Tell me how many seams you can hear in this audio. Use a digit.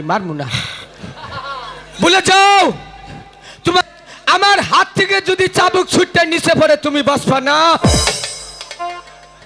1